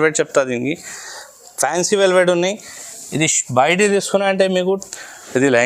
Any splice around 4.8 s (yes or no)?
yes